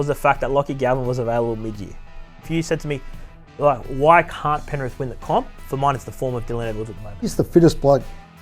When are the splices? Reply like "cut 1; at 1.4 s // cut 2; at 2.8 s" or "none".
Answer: cut 1; at 2.5 s // cut 2; at 7.3 s